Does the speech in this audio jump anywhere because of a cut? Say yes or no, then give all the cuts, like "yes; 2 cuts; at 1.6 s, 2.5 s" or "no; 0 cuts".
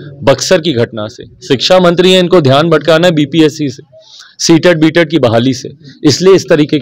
no; 0 cuts